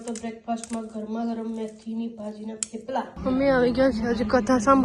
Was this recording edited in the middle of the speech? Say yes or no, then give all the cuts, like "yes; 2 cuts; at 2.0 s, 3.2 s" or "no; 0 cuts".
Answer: yes; 1 cut; at 3.1 s